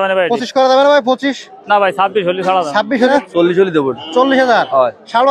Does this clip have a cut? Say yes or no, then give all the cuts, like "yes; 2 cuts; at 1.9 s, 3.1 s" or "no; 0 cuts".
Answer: yes; 1 cut; at 3.1 s